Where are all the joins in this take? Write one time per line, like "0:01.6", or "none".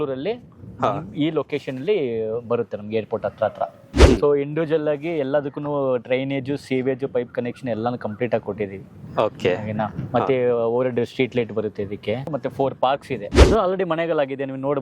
0:03.9
0:12.3
0:13.4